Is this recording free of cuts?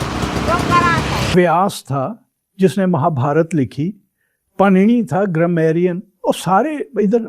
no; 1 cut; at 1.3 s

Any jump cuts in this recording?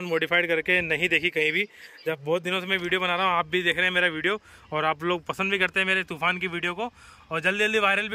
no; 0 cuts

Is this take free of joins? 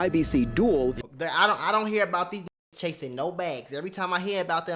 no; 1 cut; at 1.0 s

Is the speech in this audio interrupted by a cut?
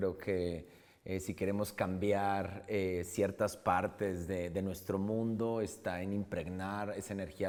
no; 0 cuts

